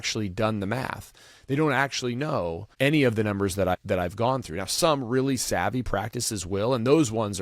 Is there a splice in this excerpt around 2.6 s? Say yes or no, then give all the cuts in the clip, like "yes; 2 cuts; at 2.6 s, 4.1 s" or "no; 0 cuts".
yes; 2 cuts; at 2.6 s, 3.7 s